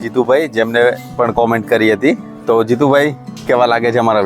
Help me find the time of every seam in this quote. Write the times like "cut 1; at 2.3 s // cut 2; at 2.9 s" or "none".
cut 1; at 3.3 s